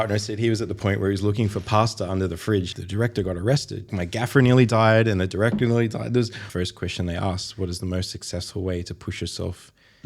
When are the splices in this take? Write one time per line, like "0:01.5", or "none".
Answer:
0:02.7
0:03.9
0:06.4